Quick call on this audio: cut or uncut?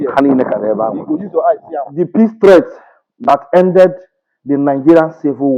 cut